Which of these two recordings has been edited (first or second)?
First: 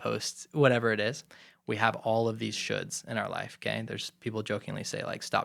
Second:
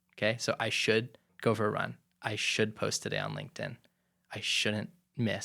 second